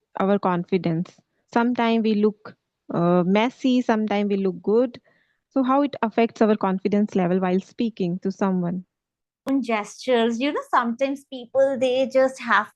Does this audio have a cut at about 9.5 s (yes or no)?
yes